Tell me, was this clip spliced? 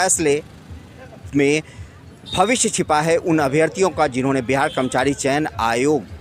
no; 0 cuts

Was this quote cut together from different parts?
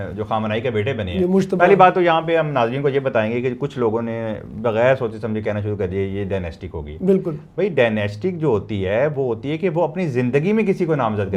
no; 0 cuts

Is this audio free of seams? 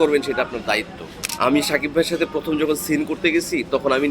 no; 1 cut; at 1.2 s

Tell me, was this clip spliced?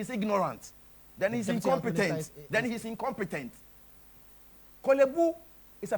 no; 0 cuts

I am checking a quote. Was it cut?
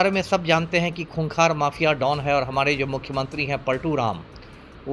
no; 0 cuts

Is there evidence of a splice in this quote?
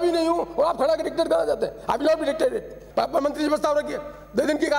yes; 1 cut; at 2.8 s

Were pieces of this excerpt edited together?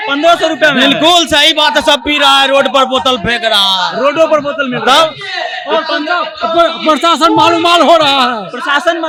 no; 0 cuts

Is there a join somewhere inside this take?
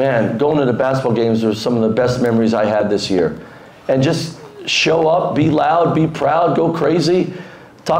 no; 0 cuts

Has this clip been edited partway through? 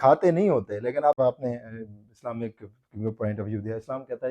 yes; 1 cut; at 1.2 s

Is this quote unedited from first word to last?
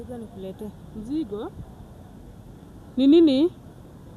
yes; 0 cuts

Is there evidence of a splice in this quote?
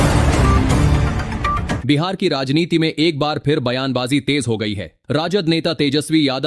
yes; 1 cut; at 1.8 s

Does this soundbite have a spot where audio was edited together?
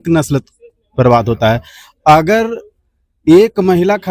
no; 0 cuts

